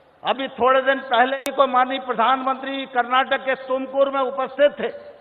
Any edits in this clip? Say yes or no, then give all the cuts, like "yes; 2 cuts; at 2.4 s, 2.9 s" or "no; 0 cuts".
yes; 1 cut; at 1.3 s